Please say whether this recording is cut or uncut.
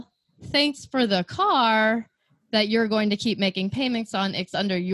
uncut